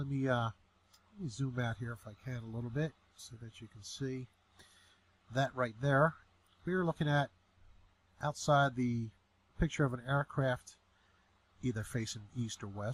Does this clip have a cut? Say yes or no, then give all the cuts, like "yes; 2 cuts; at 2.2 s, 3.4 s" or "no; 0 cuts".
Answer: no; 0 cuts